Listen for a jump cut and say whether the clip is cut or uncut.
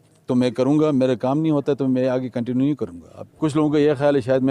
cut